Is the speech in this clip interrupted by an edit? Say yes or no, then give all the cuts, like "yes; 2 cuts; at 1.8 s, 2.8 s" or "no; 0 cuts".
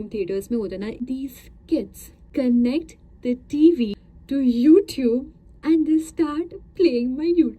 yes; 3 cuts; at 1.0 s, 2.2 s, 4.1 s